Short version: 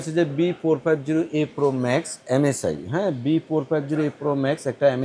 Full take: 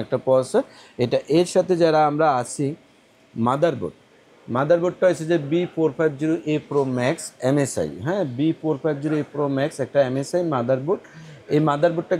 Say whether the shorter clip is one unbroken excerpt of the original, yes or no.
yes